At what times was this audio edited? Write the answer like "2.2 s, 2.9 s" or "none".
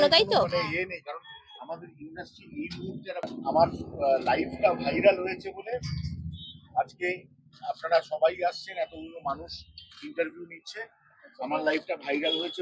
3.4 s